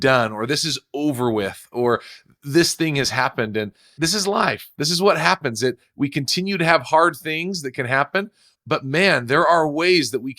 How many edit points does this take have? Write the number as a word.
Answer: one